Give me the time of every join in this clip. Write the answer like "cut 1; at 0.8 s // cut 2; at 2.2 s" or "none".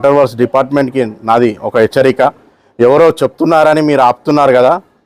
none